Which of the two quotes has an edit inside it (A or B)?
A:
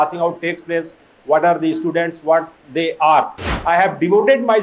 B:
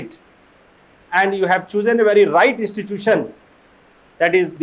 A